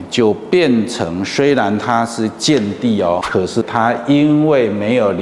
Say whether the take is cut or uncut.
cut